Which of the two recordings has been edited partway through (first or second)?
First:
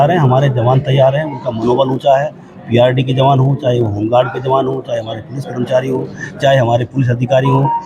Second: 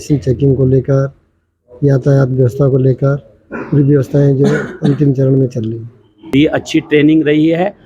second